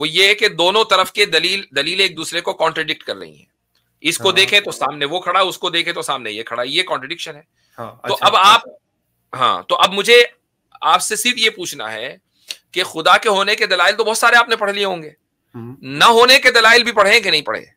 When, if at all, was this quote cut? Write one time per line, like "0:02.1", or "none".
none